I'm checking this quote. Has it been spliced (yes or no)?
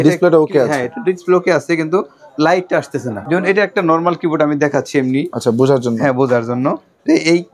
yes